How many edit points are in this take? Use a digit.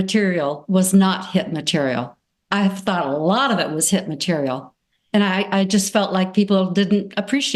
0